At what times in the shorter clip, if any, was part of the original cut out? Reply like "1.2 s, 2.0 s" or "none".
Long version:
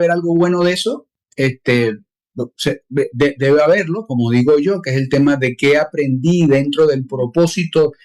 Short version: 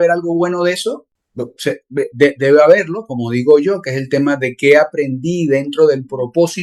1.2 s